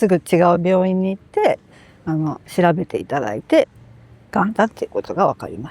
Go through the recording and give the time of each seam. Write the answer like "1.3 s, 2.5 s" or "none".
none

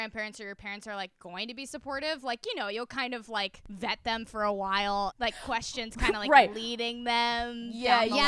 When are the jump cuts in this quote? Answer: 3.6 s, 5.1 s

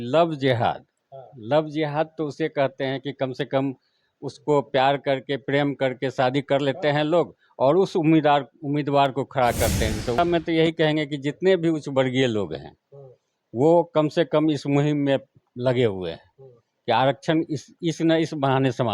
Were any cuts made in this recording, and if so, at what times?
10.2 s

